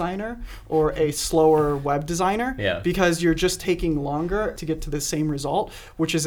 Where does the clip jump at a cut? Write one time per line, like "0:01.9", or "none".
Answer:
0:04.6